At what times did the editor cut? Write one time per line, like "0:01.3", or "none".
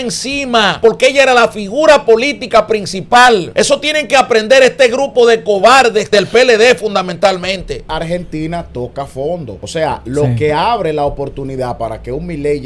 0:00.8
0:03.5
0:06.1
0:07.9
0:09.6